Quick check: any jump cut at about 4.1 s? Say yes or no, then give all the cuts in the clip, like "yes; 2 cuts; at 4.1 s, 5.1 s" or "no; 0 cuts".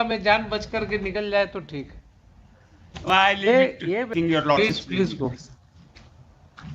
yes; 1 cut; at 4.1 s